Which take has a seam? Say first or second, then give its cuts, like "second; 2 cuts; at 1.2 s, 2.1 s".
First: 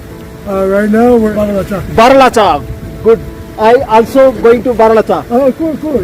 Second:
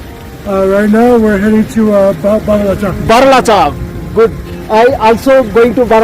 first; 1 cut; at 1.3 s